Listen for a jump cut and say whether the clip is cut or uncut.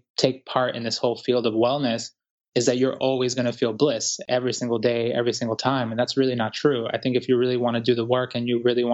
cut